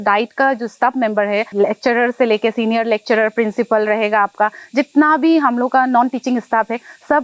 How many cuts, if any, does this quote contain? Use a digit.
1